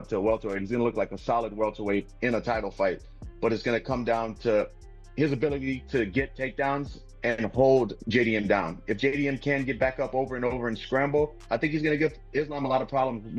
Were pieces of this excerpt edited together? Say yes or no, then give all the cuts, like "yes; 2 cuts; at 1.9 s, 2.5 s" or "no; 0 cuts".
no; 0 cuts